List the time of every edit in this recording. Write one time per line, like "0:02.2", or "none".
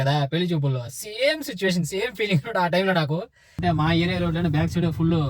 0:03.6